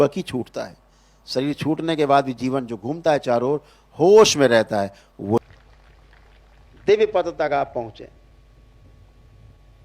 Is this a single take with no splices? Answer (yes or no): no